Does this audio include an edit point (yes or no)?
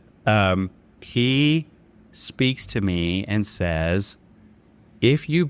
no